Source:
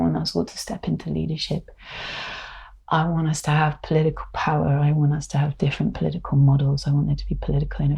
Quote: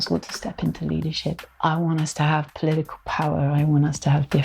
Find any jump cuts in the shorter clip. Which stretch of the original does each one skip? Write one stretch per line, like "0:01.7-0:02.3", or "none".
0:01.7-0:02.7

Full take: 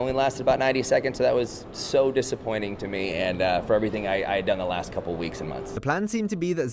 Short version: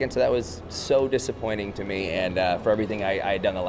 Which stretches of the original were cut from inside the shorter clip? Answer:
none

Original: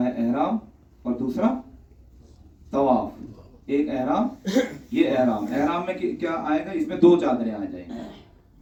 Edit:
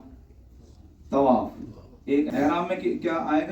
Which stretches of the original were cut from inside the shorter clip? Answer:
0:03.9-0:05.5

